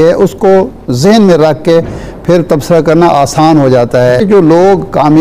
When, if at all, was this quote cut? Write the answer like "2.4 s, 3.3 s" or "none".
4.2 s

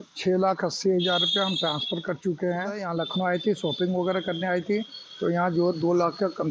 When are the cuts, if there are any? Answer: 2.8 s

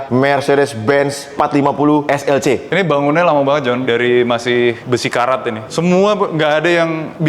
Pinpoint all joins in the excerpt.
2.7 s, 3.8 s, 5.6 s

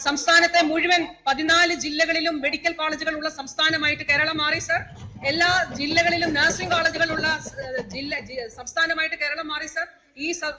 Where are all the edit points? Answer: none

